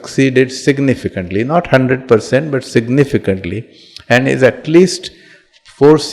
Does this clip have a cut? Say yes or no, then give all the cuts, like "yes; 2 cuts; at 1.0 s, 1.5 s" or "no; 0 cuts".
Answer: no; 0 cuts